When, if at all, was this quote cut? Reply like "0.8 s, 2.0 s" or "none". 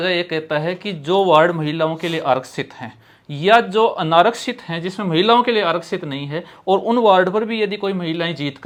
none